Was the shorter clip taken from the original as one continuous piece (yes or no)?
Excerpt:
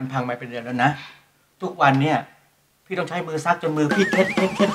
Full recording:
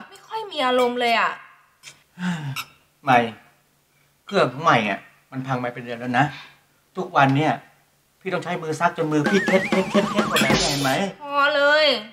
yes